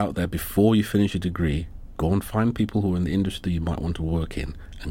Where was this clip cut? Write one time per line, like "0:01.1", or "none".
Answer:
none